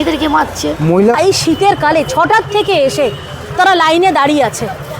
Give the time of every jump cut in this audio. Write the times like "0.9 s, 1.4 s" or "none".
1.1 s